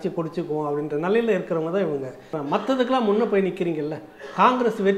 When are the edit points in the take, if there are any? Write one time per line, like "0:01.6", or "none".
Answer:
0:02.3